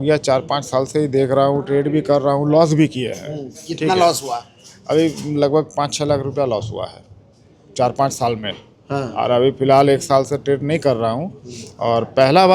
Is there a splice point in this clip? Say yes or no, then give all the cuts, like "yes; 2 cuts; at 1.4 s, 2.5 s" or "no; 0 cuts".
no; 0 cuts